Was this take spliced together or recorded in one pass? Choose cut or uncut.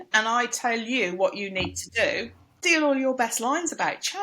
cut